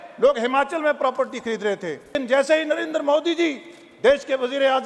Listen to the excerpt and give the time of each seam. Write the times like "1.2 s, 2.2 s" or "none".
2.2 s